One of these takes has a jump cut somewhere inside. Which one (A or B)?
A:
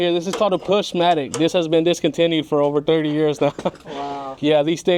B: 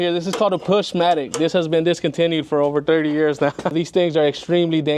B